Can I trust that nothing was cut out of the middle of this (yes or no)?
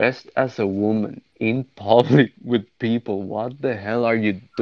no